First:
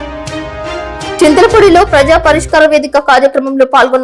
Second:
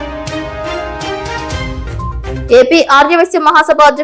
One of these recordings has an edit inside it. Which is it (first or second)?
first